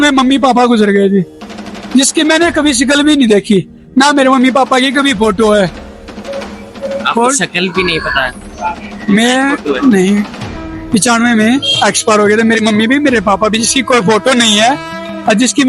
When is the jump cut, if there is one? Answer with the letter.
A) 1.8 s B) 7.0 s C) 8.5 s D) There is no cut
D